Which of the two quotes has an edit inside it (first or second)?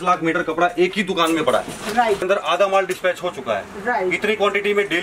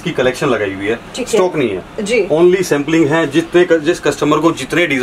first